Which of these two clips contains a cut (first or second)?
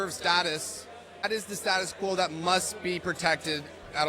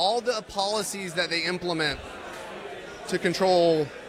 first